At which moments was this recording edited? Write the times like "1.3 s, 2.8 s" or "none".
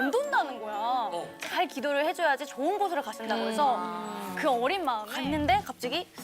1.3 s, 5.1 s